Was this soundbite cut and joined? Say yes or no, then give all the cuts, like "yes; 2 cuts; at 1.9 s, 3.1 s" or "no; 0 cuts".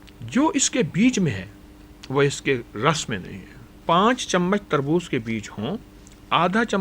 yes; 1 cut; at 3.8 s